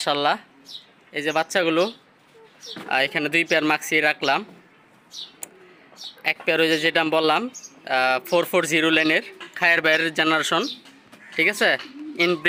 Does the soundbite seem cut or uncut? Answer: uncut